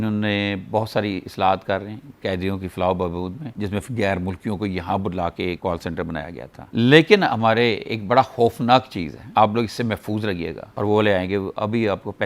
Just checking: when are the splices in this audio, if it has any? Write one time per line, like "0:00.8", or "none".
0:03.4
0:06.5
0:10.7